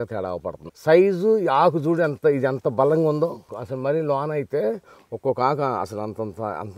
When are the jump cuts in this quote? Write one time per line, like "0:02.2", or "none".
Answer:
0:03.6